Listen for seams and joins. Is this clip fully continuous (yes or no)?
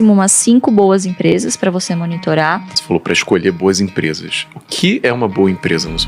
no